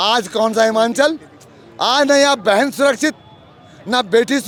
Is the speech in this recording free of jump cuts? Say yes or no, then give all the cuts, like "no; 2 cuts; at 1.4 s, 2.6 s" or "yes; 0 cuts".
yes; 0 cuts